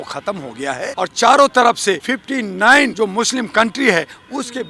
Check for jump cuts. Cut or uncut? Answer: cut